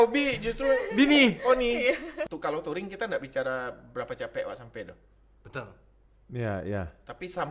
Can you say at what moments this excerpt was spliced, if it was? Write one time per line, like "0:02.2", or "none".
0:02.1